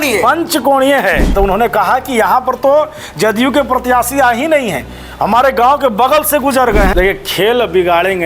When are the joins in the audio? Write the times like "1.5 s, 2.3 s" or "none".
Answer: 1.3 s, 6.9 s